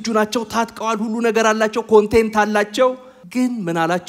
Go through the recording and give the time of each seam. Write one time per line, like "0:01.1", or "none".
0:03.1